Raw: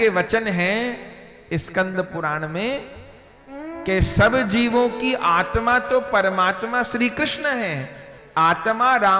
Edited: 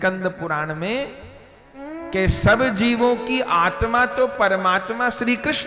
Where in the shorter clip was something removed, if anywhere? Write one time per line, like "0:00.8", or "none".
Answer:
none